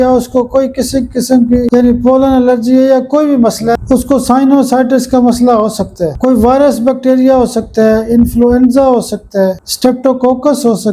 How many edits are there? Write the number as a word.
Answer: three